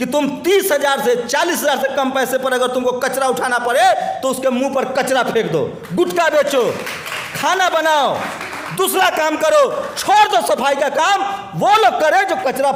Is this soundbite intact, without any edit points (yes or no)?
yes